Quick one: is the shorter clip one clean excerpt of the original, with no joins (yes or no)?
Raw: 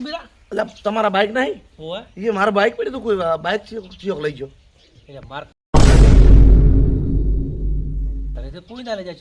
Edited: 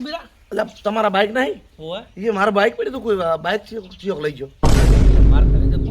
no